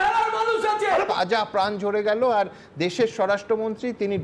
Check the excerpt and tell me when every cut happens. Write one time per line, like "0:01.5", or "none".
0:01.1